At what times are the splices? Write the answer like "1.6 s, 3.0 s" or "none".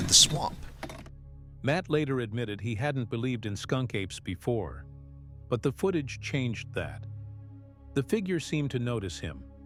none